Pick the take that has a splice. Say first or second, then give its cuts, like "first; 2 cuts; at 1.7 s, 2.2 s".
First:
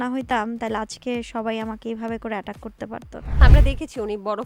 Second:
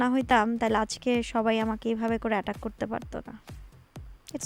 first; 1 cut; at 3.4 s